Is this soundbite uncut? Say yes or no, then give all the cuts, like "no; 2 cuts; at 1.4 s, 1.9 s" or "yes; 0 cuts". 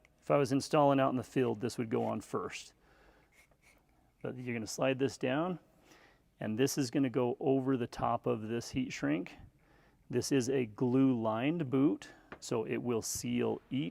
yes; 0 cuts